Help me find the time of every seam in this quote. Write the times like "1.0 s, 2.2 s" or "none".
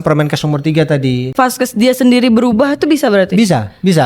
1.3 s